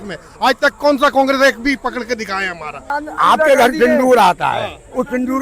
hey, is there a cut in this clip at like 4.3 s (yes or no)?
no